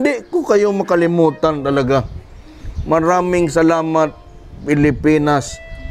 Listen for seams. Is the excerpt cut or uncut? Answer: uncut